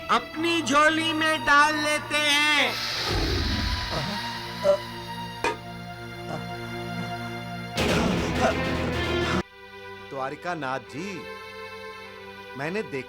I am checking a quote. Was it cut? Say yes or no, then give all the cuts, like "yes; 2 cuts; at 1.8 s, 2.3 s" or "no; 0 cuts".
yes; 1 cut; at 9.4 s